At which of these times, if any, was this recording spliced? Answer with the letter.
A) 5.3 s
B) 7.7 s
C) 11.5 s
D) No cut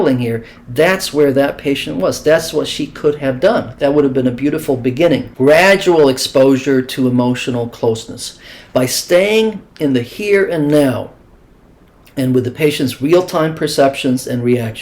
A